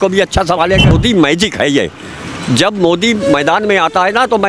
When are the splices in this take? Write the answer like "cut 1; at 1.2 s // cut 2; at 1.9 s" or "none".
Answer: cut 1; at 0.9 s

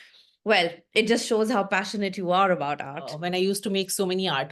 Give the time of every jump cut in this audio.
cut 1; at 3.2 s

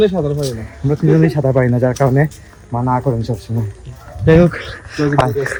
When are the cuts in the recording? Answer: none

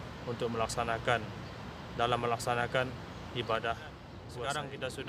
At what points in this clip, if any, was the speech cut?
cut 1; at 4.2 s

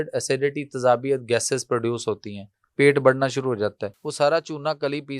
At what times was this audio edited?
cut 1; at 4.0 s

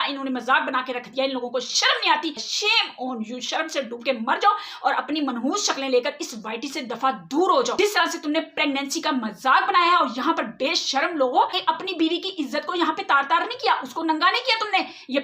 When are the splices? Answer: cut 1; at 2.5 s // cut 2; at 7.7 s // cut 3; at 11.6 s

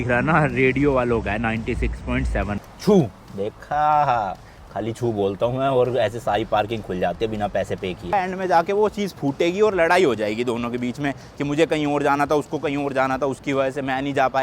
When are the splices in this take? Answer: cut 1; at 2.6 s // cut 2; at 8.1 s

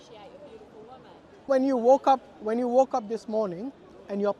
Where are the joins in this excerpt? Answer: cut 1; at 1.5 s

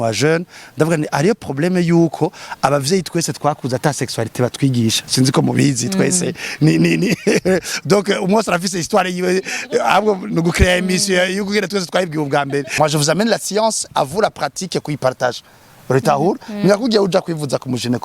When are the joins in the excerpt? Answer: cut 1; at 12.7 s

